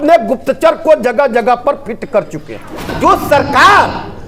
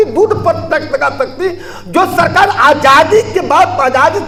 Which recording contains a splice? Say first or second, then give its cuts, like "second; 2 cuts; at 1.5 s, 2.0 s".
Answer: first; 1 cut; at 2.9 s